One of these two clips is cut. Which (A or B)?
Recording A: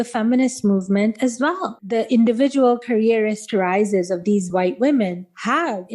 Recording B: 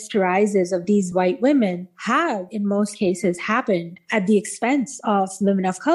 A